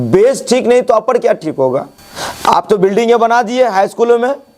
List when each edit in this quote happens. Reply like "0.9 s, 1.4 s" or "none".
2.0 s